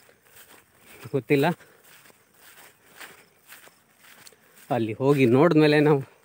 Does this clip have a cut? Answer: no; 0 cuts

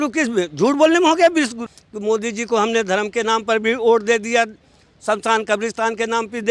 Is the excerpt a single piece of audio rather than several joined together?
no; 1 cut; at 1.7 s

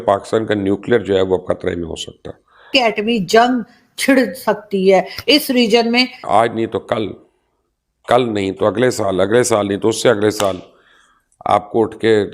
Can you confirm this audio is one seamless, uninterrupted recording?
no; 2 cuts; at 2.7 s, 6.2 s

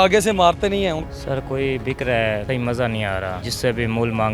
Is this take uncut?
no; 3 cuts; at 1.0 s, 2.4 s, 3.4 s

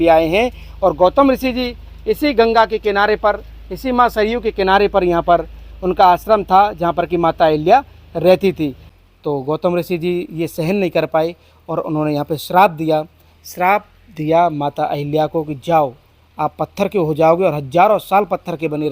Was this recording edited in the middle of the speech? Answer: yes; 1 cut; at 8.9 s

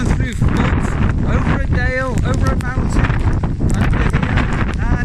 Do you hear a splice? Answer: no; 0 cuts

